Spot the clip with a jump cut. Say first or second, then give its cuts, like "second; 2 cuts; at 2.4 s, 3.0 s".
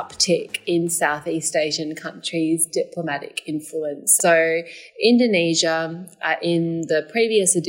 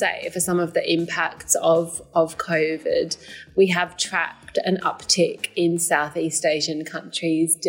first; 1 cut; at 4.0 s